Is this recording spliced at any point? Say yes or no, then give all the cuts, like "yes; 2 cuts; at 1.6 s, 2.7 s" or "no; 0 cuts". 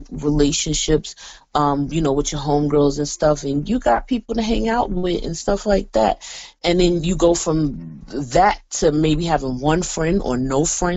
no; 0 cuts